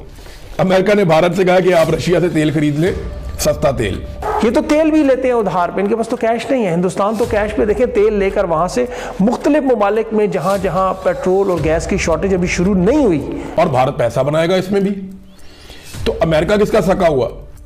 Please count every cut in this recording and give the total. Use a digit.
2